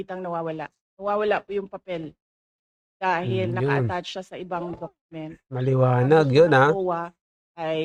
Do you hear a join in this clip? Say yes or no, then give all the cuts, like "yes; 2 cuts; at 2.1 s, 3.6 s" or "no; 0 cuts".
no; 0 cuts